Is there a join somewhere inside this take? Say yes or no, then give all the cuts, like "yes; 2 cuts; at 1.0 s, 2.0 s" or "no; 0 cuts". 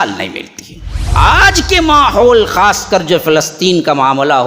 yes; 1 cut; at 1.1 s